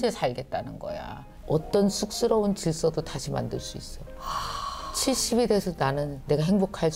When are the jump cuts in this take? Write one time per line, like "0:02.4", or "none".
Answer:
0:01.3